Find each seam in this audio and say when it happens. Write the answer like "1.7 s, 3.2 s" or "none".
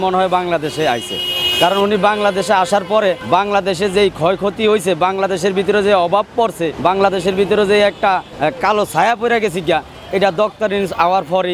none